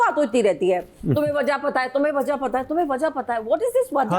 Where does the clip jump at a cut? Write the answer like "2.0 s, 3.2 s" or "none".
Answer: none